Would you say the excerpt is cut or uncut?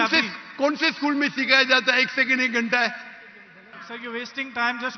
cut